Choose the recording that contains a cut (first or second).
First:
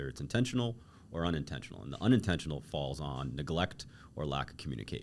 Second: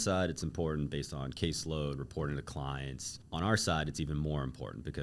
second